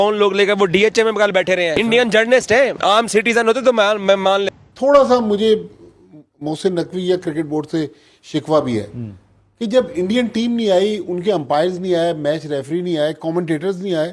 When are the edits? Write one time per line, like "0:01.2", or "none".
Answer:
0:01.8
0:04.5